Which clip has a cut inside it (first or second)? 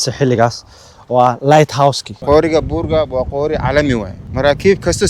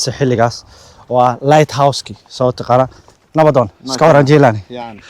first